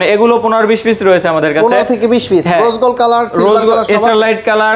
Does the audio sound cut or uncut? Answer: uncut